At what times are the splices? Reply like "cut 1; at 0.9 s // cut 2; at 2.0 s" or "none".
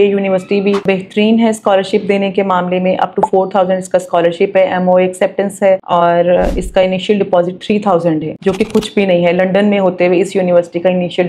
none